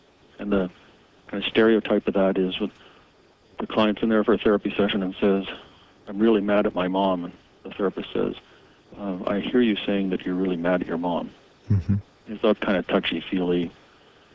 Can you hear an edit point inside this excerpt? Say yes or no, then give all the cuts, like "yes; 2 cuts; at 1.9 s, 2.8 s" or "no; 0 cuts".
yes; 1 cut; at 1.5 s